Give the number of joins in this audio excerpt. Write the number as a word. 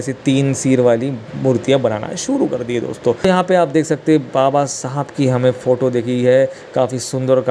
zero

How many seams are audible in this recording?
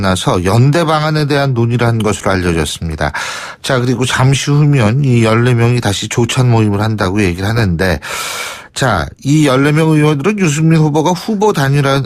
zero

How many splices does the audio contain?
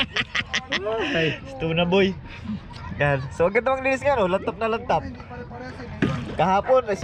zero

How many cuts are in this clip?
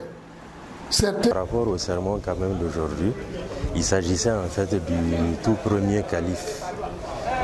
one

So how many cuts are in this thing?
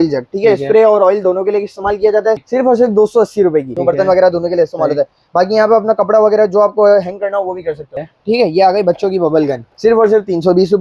four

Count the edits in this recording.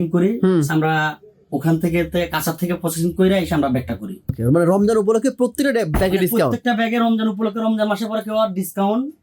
one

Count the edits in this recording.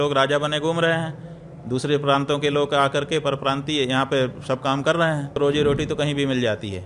one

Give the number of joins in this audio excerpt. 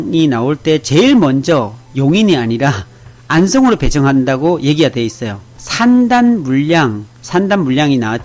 one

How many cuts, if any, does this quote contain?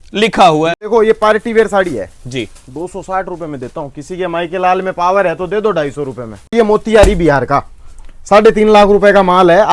two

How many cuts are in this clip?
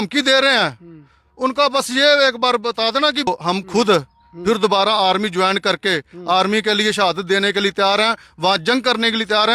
one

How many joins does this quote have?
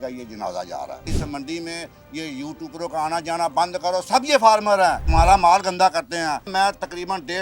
three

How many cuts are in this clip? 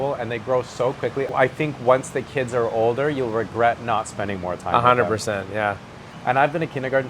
two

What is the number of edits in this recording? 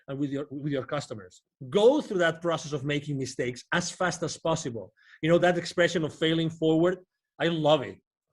one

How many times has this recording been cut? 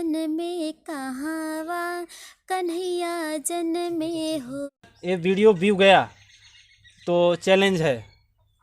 one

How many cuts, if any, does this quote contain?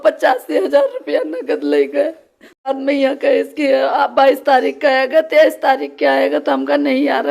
one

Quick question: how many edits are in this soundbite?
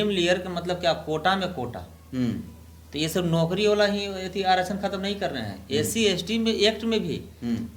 zero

